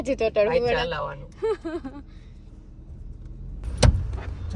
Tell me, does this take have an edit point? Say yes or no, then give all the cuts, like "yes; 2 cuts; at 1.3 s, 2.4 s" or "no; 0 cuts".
no; 0 cuts